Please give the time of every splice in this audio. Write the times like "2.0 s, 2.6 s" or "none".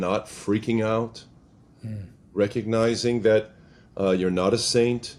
none